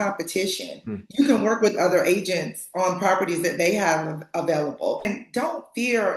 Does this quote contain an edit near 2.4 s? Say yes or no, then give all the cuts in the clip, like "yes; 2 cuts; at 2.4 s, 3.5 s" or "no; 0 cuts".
no; 1 cut; at 5.1 s